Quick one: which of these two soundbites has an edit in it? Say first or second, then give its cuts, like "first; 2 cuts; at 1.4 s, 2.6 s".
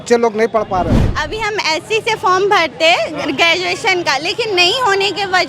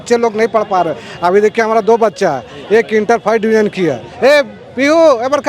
first; 1 cut; at 1.0 s